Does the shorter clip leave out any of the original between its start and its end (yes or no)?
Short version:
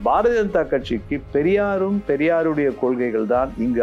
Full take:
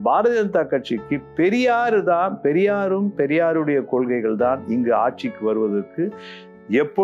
yes